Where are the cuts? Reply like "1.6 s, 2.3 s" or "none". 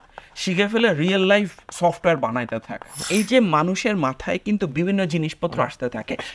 3.0 s

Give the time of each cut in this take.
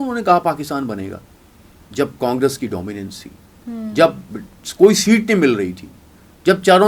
none

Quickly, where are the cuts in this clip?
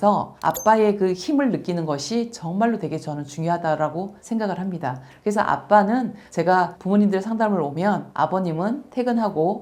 none

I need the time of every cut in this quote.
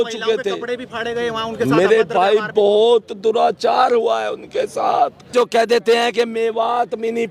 5.3 s

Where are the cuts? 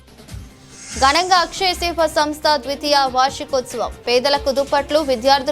0.9 s

